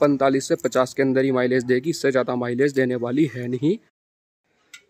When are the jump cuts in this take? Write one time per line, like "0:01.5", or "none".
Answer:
none